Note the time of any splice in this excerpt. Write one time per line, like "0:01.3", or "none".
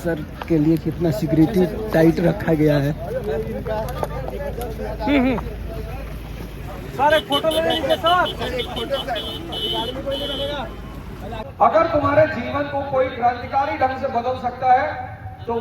0:11.5

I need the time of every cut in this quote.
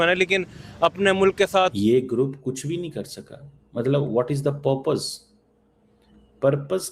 0:01.7

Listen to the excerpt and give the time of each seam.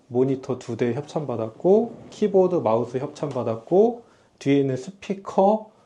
none

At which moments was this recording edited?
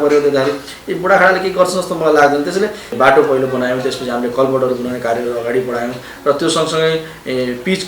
0:02.8
0:06.1

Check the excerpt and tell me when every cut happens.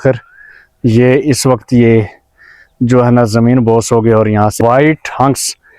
0:04.5

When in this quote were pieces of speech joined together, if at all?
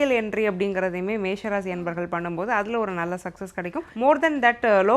0:03.9

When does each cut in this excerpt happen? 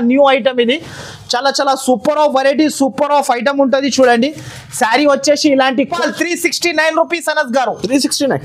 0:05.9

